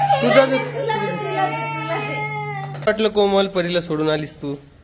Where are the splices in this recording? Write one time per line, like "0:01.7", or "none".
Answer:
0:02.7

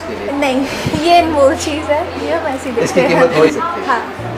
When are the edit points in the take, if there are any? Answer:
0:03.5

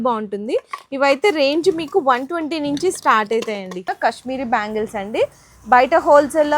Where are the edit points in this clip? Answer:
0:03.8

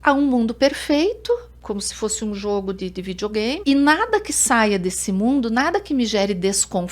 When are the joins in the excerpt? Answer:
0:01.5
0:03.6

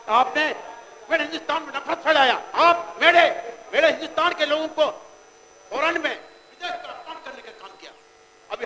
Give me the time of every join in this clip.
0:02.4

